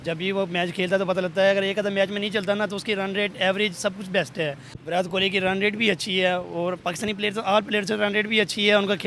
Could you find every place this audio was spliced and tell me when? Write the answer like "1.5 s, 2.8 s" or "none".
4.7 s